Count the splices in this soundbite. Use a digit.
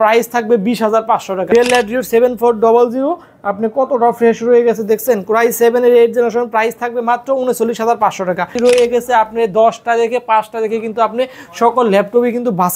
2